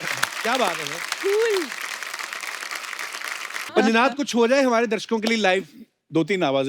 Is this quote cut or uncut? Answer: cut